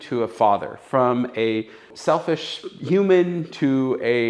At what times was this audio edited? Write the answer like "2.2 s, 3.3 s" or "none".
1.9 s